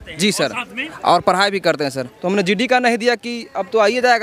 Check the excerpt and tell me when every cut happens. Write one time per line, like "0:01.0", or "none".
0:02.1